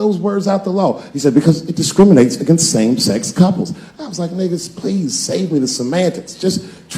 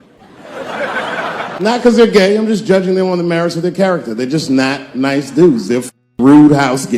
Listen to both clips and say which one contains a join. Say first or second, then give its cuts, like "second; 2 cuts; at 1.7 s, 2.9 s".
second; 1 cut; at 1.6 s